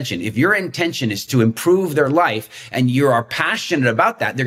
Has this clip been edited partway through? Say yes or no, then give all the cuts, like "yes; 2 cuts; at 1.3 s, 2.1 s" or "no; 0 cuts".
yes; 1 cut; at 1.3 s